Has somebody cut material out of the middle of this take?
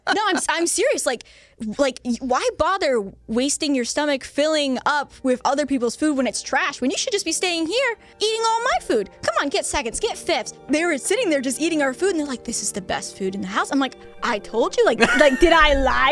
yes; 2 cuts; at 8.1 s, 10.6 s

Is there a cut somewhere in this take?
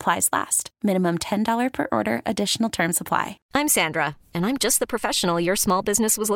yes; 1 cut; at 3.4 s

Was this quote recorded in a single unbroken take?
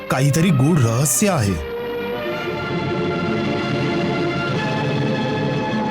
yes; 0 cuts

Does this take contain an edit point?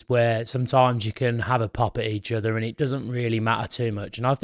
no; 0 cuts

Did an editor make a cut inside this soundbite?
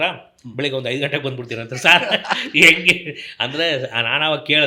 no; 0 cuts

